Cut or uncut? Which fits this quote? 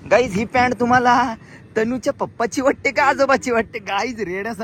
uncut